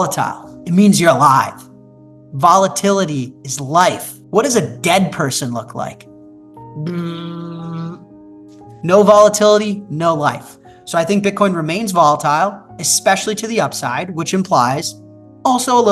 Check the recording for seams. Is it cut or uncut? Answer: cut